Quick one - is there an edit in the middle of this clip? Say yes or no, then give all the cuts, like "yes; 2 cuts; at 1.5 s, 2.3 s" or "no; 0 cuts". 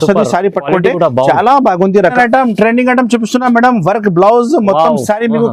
yes; 1 cut; at 2.2 s